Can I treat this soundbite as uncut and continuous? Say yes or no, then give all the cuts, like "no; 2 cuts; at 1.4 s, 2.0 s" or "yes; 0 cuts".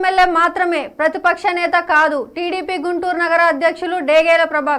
yes; 0 cuts